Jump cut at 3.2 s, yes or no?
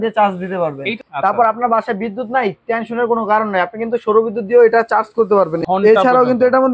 no